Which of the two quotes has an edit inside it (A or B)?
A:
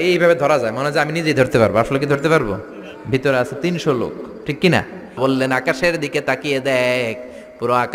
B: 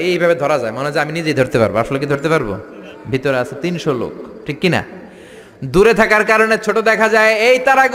A